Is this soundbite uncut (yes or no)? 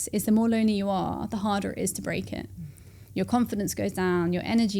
yes